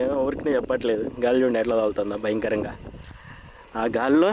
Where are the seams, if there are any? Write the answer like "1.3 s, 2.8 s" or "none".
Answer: none